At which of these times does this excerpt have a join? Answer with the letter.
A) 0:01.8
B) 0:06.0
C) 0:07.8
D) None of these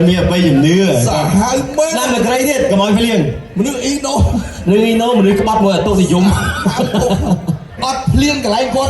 C